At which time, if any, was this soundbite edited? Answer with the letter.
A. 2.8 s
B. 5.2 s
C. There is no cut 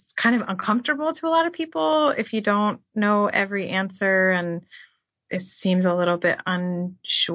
B